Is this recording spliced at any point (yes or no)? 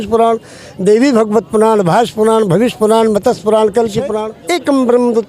yes